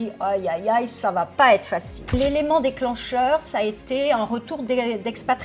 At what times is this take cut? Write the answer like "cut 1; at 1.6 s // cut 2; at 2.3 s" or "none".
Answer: cut 1; at 2.1 s